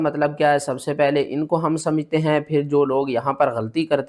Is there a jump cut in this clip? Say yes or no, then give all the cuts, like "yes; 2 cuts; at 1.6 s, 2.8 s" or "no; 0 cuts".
no; 0 cuts